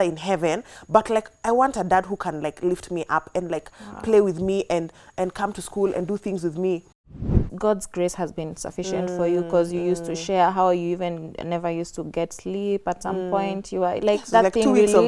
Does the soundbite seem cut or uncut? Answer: cut